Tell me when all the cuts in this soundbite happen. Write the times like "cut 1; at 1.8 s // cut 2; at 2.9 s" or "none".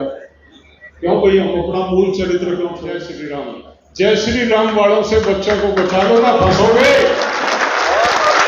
cut 1; at 3.1 s